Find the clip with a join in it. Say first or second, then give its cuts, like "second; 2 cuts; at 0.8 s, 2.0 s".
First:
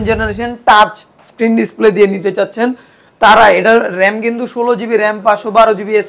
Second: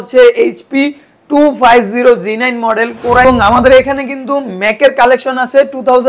second; 1 cut; at 3.2 s